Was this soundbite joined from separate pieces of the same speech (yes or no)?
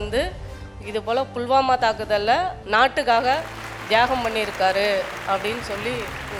no